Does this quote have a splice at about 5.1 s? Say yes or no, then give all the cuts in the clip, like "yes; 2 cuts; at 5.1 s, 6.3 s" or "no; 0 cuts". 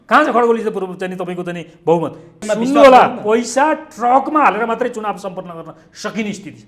no; 1 cut; at 2.4 s